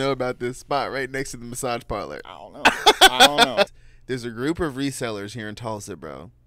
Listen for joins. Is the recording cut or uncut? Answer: cut